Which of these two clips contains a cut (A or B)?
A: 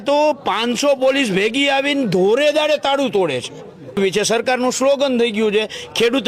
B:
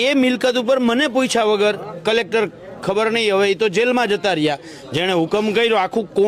A